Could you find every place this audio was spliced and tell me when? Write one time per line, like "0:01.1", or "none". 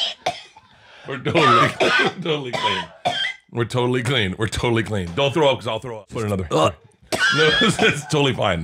0:06.0